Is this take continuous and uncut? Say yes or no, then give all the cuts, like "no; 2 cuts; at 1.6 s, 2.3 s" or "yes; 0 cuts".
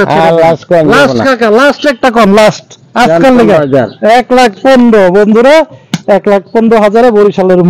yes; 0 cuts